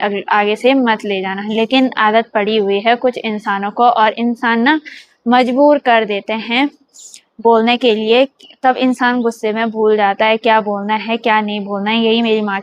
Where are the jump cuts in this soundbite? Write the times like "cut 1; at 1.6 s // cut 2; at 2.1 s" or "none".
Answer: none